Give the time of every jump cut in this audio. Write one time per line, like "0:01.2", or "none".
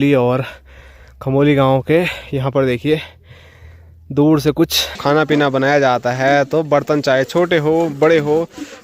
0:04.9